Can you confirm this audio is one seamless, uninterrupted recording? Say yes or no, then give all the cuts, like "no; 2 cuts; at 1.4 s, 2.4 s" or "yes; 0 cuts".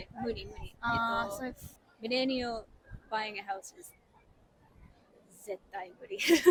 yes; 0 cuts